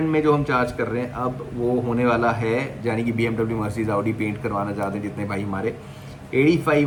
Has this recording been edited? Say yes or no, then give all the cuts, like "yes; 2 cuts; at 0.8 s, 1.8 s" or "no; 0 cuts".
no; 0 cuts